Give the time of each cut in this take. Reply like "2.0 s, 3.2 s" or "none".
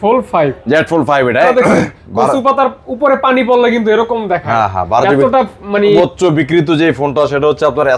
1.5 s, 6.0 s